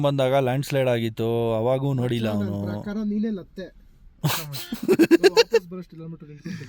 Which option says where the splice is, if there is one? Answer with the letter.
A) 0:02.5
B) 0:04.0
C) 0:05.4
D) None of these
D